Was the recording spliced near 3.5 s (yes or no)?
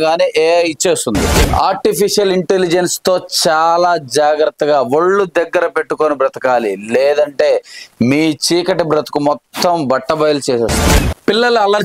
no